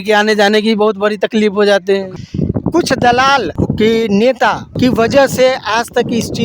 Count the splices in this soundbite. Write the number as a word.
three